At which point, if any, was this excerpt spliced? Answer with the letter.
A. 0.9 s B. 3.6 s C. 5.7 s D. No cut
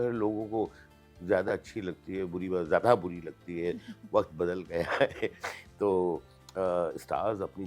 D